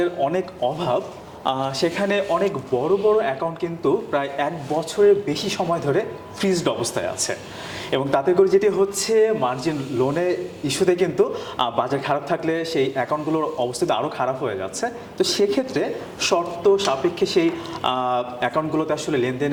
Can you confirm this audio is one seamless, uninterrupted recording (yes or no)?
yes